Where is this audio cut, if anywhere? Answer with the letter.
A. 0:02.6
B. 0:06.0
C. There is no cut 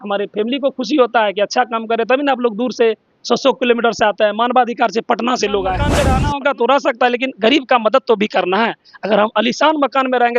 B